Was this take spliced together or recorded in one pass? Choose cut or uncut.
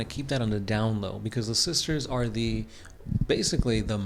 uncut